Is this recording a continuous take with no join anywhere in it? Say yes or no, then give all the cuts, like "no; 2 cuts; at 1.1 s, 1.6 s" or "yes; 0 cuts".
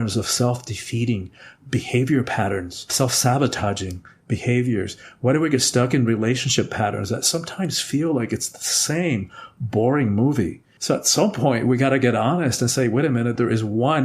no; 1 cut; at 10.7 s